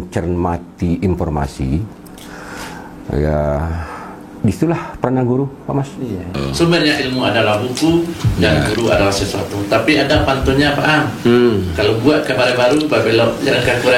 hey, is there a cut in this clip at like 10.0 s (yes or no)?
no